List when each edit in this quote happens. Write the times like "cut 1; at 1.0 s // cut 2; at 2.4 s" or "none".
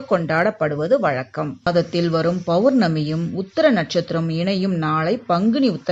cut 1; at 1.6 s